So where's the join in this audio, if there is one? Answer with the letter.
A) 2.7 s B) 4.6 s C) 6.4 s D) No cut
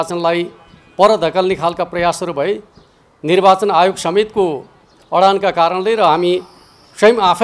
D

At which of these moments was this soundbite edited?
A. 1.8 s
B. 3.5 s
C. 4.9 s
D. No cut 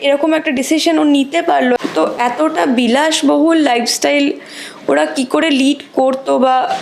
A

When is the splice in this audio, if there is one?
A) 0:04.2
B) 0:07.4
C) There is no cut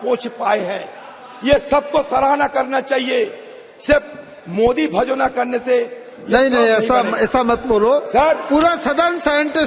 C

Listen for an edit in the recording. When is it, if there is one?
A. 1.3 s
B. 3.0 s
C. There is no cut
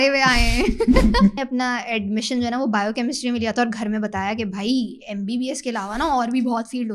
A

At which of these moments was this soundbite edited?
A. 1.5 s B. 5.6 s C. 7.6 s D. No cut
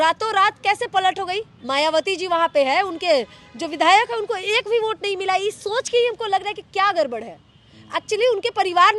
A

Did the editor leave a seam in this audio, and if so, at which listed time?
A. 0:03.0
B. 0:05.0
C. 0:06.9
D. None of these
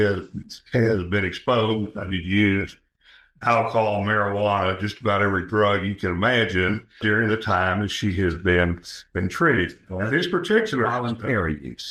D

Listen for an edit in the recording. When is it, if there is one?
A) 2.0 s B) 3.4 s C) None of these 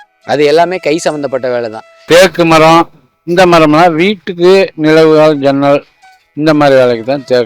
A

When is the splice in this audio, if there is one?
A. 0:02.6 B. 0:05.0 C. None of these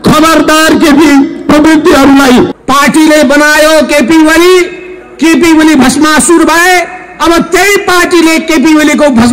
A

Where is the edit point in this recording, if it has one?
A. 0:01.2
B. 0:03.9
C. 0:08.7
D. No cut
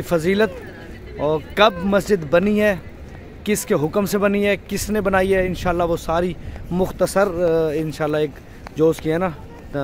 D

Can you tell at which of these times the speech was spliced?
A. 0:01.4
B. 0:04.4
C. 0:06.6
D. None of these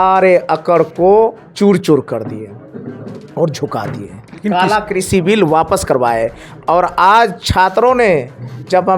A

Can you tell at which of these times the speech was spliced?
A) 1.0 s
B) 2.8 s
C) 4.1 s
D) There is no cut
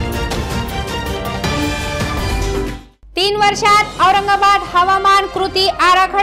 B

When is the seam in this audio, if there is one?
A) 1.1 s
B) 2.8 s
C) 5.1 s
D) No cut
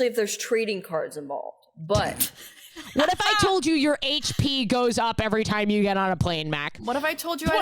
B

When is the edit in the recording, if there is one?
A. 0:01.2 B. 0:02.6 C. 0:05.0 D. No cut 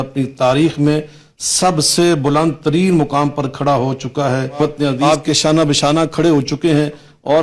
C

